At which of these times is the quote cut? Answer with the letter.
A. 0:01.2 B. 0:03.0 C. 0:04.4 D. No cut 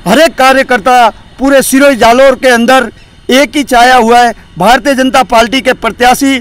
D